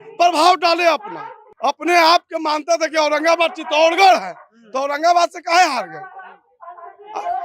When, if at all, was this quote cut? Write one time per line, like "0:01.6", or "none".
0:01.4